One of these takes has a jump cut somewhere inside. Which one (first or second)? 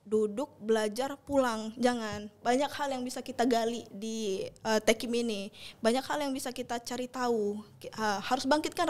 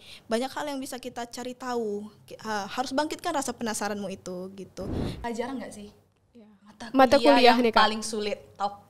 second